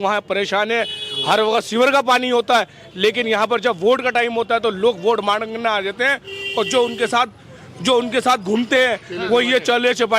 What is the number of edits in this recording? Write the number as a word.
zero